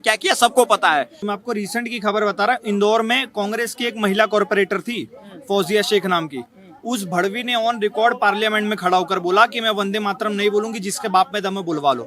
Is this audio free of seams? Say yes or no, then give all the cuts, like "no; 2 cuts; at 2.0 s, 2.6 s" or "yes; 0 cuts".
no; 1 cut; at 1.2 s